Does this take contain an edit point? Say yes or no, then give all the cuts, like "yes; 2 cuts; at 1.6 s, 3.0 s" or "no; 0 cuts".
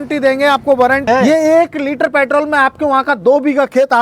yes; 1 cut; at 1.0 s